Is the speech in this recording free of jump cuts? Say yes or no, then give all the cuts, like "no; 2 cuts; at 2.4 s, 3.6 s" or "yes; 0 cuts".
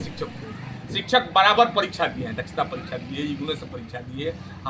yes; 0 cuts